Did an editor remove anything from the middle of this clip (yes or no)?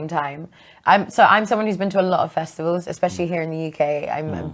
no